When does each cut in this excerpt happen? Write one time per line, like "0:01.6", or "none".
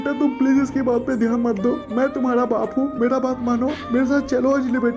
none